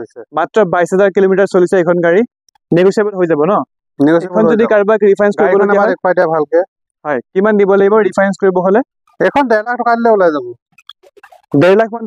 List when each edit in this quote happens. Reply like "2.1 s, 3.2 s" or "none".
none